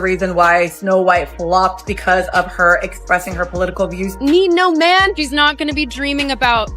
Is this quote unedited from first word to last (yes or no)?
no